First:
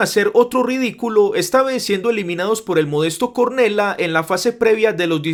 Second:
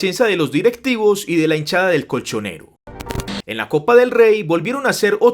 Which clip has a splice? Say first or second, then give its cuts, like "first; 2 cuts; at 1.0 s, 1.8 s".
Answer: second; 1 cut; at 3.0 s